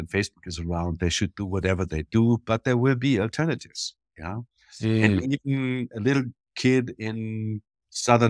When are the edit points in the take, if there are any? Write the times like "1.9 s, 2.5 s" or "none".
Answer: none